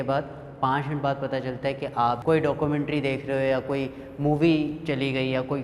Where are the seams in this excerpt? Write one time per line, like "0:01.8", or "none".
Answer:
0:02.2